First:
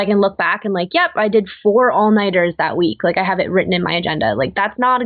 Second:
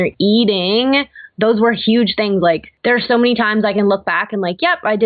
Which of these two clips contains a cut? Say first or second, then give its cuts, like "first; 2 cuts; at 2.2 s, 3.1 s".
second; 1 cut; at 2.7 s